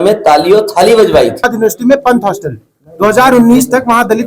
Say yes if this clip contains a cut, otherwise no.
yes